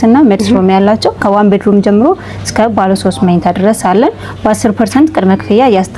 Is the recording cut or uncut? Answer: cut